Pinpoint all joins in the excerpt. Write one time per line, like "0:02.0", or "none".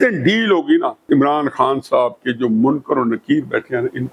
0:01.0